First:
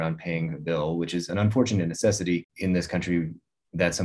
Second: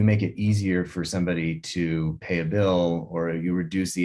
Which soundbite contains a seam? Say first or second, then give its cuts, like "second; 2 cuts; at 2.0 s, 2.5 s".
first; 2 cuts; at 1.3 s, 2.5 s